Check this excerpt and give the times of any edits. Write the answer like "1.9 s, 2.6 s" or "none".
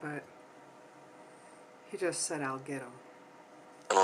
none